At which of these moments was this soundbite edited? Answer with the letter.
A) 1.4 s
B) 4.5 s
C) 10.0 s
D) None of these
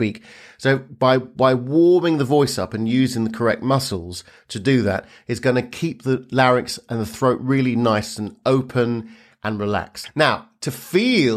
C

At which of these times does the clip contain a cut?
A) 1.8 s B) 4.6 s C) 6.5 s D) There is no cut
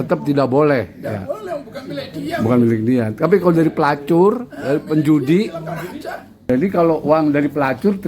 C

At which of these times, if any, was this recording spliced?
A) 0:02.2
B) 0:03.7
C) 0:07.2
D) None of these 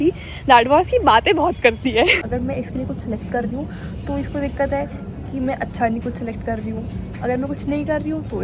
A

